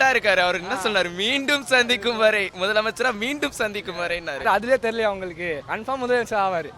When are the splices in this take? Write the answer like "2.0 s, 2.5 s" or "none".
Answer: 4.4 s, 5.7 s